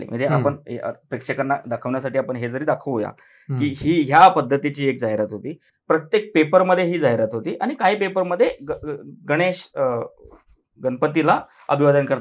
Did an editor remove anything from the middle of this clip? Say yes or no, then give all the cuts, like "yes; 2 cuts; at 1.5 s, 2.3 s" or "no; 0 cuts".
no; 0 cuts